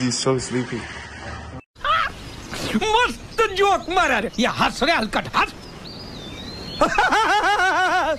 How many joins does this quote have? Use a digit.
0